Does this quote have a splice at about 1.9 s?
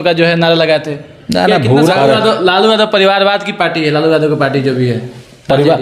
yes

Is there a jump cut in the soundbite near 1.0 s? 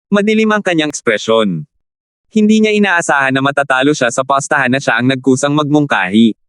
yes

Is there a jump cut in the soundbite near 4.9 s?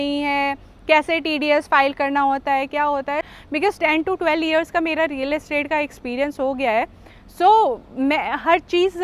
no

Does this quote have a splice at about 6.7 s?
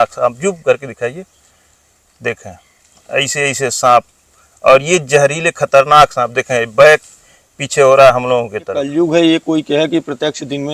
no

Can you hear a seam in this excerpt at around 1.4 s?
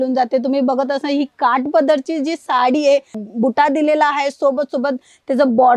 no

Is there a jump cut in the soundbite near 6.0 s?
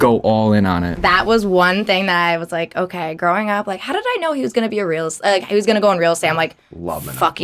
no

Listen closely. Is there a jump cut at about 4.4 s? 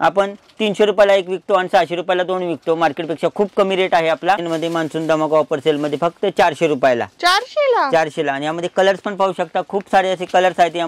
yes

